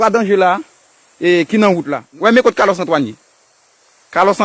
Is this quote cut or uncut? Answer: cut